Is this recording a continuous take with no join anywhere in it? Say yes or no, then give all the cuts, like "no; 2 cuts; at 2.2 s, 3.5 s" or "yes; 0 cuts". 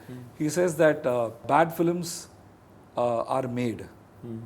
no; 1 cut; at 1.4 s